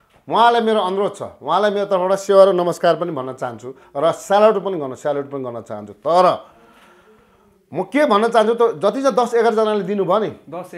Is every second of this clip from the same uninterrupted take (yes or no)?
yes